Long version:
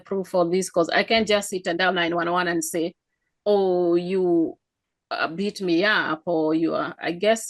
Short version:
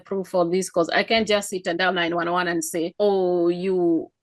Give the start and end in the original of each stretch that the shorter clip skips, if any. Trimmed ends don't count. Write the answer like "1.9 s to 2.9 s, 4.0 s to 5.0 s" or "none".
2.9 s to 3.4 s